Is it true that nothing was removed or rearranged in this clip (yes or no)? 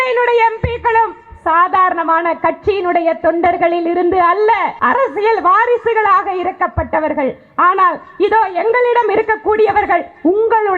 no